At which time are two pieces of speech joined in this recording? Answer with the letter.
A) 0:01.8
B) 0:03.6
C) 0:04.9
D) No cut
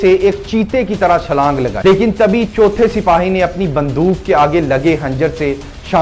A